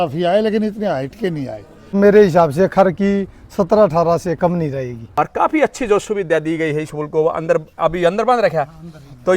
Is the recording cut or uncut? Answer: cut